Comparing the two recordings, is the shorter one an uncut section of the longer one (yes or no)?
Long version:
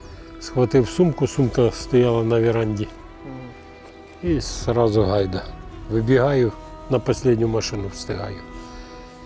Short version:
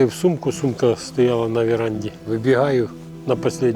no